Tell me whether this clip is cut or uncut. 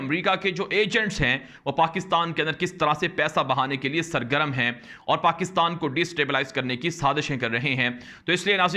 uncut